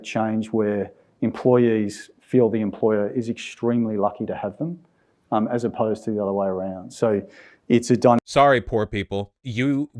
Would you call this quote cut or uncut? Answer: uncut